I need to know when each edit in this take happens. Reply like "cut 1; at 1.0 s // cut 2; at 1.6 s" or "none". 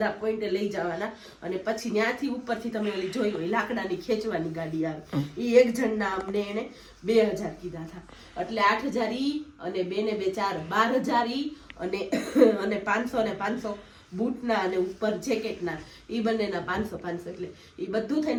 none